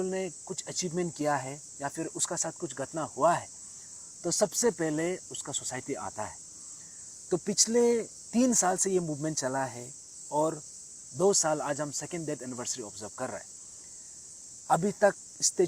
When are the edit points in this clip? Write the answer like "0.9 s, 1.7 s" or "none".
none